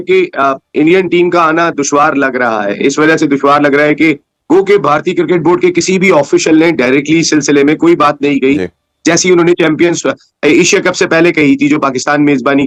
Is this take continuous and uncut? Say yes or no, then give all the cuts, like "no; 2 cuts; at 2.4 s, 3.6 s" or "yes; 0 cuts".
yes; 0 cuts